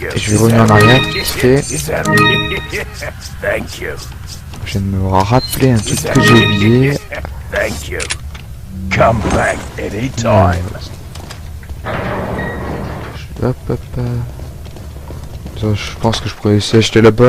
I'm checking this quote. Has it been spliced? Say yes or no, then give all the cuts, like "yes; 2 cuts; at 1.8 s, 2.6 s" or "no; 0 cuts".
no; 0 cuts